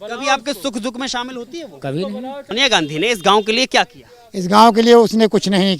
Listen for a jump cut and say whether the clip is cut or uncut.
cut